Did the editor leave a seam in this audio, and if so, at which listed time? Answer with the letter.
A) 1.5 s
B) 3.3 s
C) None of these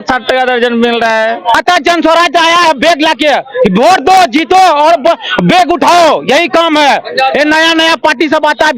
A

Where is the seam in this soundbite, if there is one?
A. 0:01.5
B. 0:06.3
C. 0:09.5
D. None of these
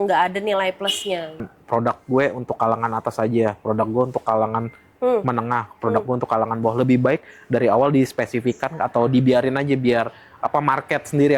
A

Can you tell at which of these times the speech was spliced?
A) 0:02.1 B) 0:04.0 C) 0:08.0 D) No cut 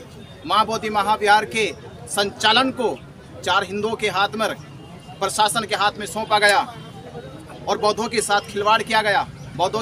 D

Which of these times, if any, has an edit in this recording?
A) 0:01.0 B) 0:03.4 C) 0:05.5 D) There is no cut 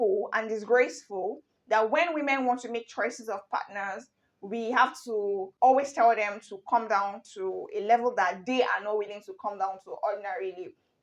C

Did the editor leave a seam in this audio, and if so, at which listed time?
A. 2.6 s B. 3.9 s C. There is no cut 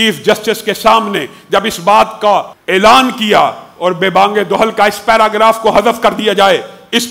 A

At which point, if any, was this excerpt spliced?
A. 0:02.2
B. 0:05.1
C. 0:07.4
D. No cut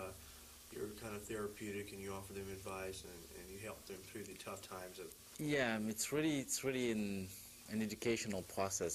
A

